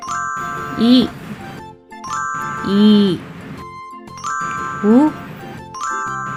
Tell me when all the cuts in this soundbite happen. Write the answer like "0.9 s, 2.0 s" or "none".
none